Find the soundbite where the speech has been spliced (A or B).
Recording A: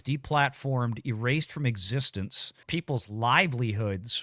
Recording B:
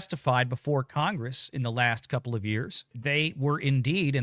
B